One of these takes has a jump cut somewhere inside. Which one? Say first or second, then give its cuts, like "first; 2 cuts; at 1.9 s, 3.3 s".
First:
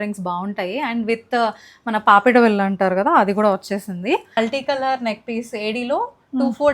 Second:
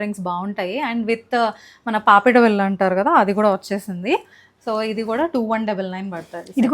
first; 1 cut; at 4.4 s